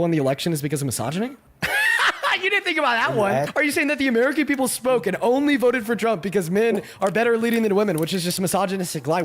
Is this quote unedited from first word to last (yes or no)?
no